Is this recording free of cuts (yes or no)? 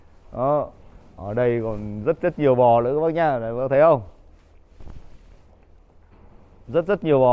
yes